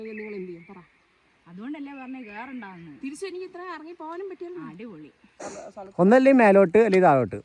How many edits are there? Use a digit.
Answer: 1